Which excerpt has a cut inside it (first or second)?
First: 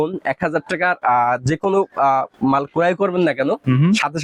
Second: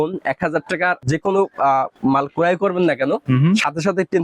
second